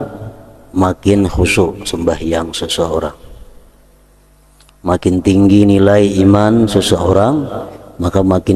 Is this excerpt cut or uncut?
uncut